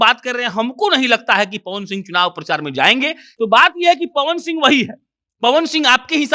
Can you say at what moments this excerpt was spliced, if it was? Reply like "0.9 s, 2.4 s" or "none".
3.2 s